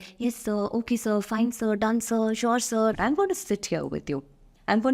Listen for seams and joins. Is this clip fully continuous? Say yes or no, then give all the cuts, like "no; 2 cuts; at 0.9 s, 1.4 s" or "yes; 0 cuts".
no; 1 cut; at 3.0 s